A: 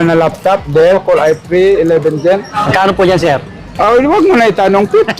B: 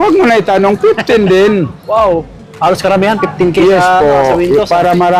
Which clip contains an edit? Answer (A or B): A